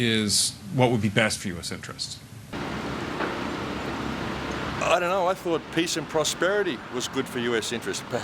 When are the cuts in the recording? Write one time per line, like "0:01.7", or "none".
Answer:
none